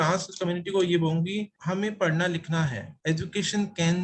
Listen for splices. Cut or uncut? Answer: cut